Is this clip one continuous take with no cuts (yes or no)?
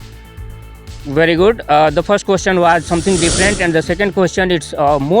no